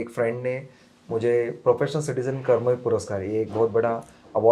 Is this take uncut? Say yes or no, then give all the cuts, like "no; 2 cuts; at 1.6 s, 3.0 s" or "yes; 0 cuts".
yes; 0 cuts